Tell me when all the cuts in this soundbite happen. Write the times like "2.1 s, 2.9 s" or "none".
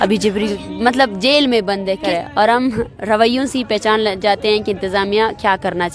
2.0 s